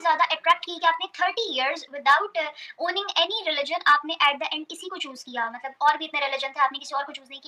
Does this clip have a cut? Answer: no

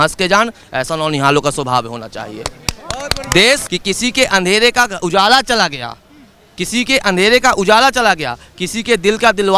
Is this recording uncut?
no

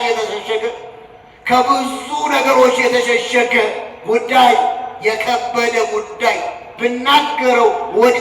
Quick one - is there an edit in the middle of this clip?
no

